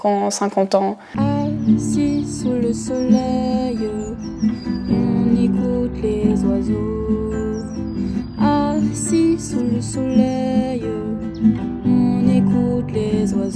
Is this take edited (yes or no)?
yes